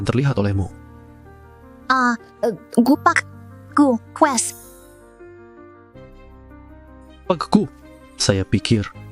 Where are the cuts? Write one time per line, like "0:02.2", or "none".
0:04.4
0:06.9